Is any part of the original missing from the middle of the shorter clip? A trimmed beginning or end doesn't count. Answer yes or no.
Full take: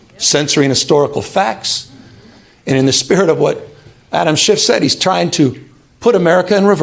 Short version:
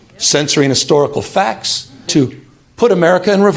yes